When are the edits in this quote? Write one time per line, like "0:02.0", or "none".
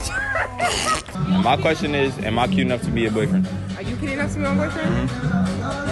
0:01.1